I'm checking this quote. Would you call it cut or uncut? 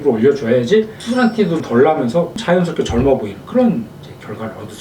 cut